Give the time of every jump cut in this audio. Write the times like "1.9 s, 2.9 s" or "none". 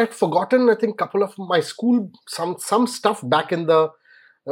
none

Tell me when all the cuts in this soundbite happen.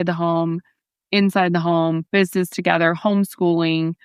none

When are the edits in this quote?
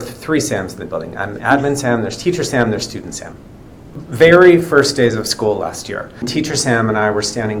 4.0 s, 6.3 s

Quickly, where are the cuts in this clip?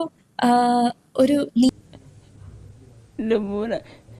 1.7 s

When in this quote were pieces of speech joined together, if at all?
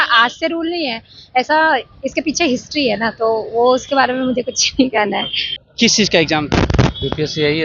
none

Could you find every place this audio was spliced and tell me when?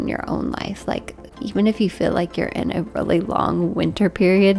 1.4 s

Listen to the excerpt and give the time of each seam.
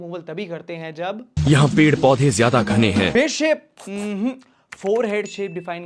3.1 s

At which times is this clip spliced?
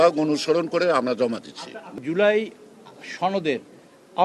2.0 s

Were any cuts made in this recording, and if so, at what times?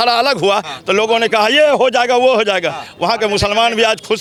none

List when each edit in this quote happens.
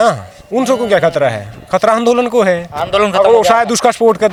none

